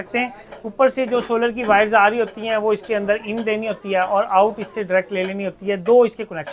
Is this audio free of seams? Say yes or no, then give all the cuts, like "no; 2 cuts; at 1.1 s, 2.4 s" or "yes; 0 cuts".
yes; 0 cuts